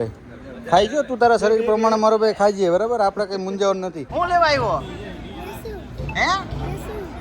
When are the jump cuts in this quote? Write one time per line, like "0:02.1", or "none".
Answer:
0:04.0